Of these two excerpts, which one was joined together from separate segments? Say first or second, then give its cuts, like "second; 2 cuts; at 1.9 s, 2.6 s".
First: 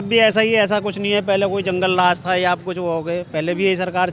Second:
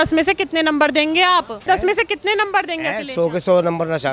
second; 1 cut; at 1.6 s